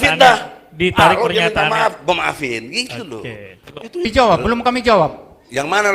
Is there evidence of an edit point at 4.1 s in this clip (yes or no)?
yes